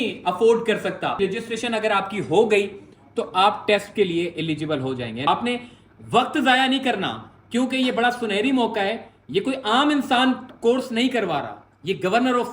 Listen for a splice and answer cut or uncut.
cut